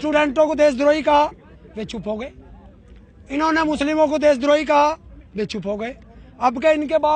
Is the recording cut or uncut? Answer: uncut